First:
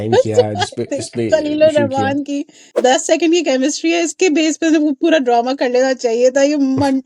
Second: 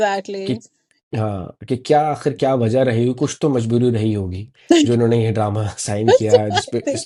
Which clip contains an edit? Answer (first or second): first